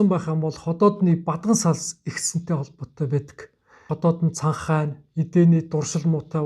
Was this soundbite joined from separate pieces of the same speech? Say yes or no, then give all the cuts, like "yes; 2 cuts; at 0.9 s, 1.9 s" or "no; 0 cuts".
yes; 1 cut; at 3.9 s